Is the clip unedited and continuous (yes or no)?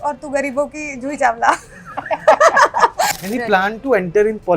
no